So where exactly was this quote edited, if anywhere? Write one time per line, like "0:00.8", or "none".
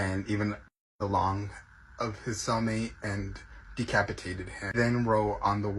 0:00.8
0:04.8